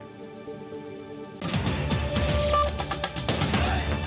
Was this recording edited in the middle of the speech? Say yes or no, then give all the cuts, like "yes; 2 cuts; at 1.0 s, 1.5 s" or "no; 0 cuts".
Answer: yes; 1 cut; at 1.4 s